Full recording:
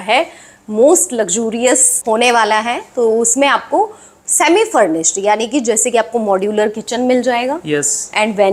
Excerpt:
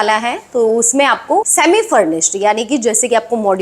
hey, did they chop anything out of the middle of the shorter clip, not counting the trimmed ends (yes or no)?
yes